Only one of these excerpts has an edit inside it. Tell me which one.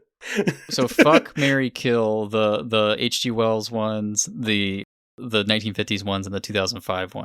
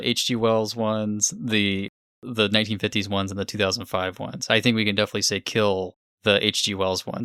first; 1 cut; at 1.0 s

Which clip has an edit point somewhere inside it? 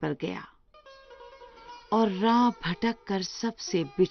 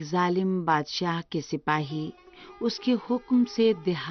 second; 1 cut; at 2.3 s

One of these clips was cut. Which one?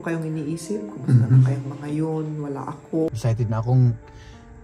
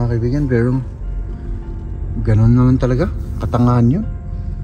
first; 1 cut; at 3.1 s

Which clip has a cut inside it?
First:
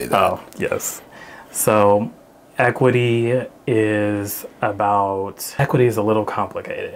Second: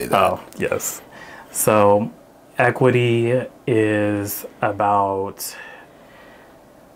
first; 1 cut; at 5.6 s

